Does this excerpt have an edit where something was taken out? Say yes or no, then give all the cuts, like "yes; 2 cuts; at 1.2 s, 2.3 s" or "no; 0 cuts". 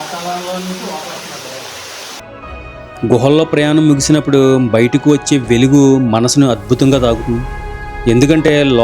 yes; 1 cut; at 2.3 s